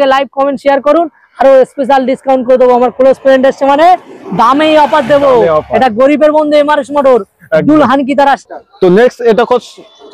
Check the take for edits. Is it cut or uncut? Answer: uncut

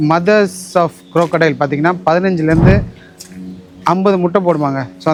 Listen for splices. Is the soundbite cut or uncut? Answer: uncut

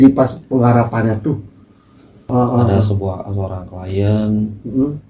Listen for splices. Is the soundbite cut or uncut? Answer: cut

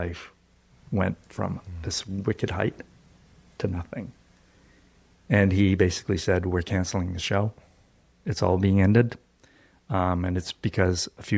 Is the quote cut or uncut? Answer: uncut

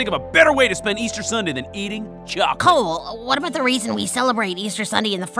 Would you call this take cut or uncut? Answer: cut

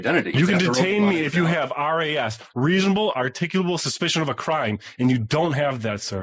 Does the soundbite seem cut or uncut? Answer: uncut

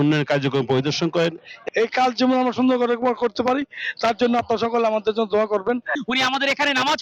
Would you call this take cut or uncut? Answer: cut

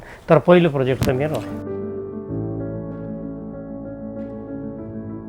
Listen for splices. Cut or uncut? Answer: uncut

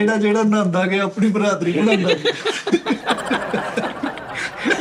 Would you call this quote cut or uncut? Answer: uncut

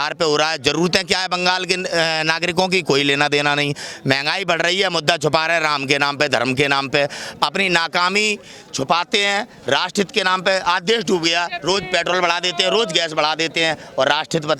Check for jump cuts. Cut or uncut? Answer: uncut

